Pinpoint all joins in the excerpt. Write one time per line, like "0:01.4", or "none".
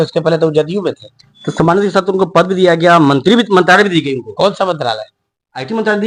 none

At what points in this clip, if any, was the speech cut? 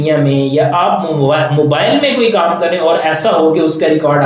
none

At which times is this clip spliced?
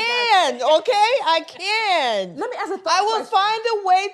none

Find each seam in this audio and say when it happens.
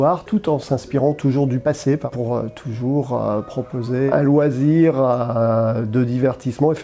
0:02.1
0:04.1

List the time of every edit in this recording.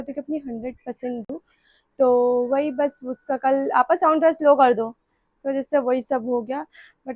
none

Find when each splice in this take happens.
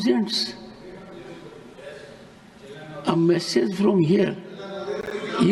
none

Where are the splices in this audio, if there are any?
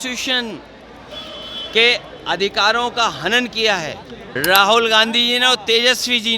0:04.3

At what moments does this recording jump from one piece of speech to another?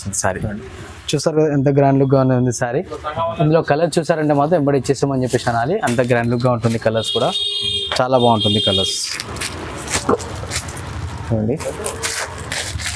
none

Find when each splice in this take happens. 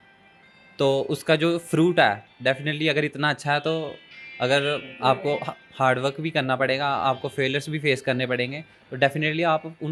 none

